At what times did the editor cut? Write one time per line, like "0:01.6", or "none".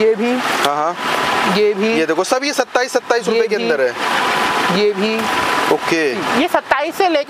none